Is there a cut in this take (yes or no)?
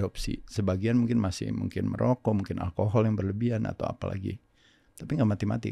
no